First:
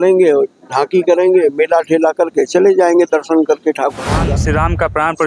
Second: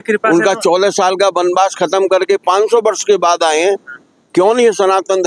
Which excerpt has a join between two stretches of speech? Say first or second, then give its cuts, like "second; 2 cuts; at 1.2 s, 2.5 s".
first; 1 cut; at 4.2 s